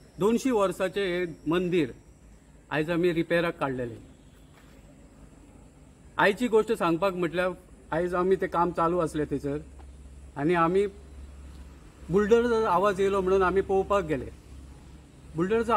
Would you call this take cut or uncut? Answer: uncut